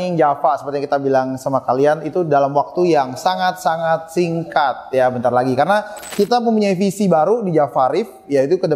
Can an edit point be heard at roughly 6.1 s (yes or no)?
yes